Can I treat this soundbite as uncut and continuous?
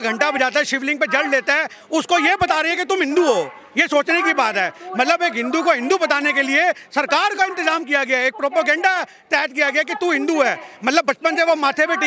yes; 0 cuts

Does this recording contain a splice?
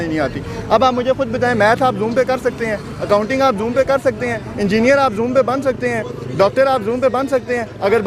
no; 0 cuts

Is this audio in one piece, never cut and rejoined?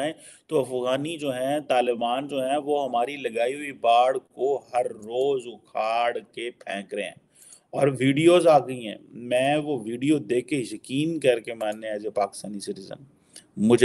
yes; 0 cuts

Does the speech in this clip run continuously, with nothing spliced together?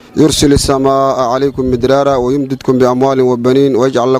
yes; 0 cuts

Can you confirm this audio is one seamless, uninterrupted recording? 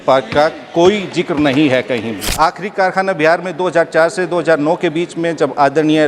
no; 1 cut; at 2.3 s

